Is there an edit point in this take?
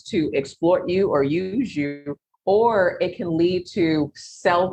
no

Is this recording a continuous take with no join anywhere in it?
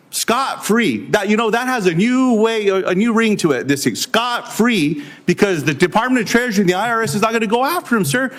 yes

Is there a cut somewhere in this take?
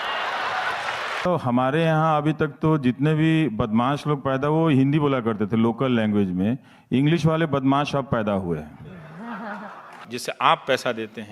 yes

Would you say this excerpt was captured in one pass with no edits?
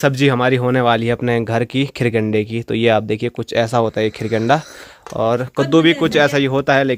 yes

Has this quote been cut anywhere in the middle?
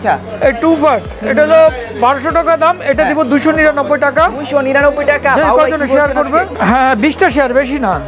yes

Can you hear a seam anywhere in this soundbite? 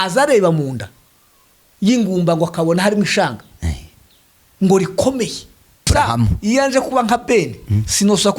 yes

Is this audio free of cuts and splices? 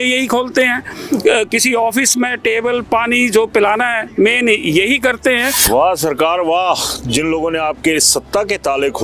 yes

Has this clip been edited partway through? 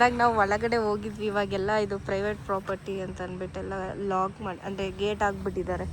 no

